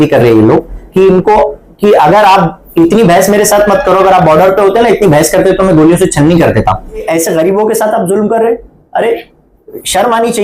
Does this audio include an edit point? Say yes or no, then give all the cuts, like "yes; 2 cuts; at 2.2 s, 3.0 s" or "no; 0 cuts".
yes; 1 cut; at 7.0 s